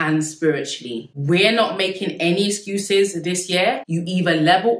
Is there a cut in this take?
yes; 2 cuts; at 1.0 s, 3.8 s

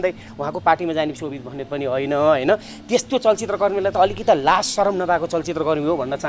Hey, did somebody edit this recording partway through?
no; 0 cuts

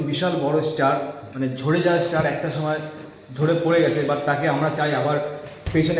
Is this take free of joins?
yes; 0 cuts

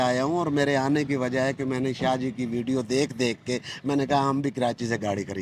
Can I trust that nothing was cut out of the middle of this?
yes; 0 cuts

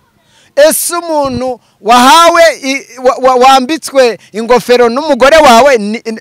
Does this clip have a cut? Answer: no; 0 cuts

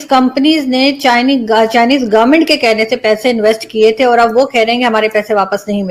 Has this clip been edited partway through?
no; 0 cuts

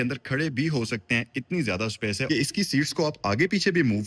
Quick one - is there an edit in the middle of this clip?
yes; 1 cut; at 2.2 s

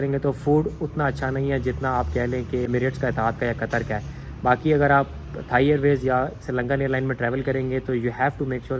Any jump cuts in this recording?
no; 0 cuts

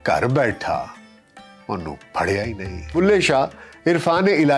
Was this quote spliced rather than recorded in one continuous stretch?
yes; 1 cut; at 2.7 s

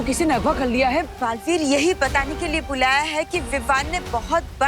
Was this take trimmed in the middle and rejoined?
yes; 1 cut; at 1.1 s

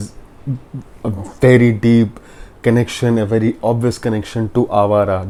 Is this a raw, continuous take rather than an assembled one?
yes; 0 cuts

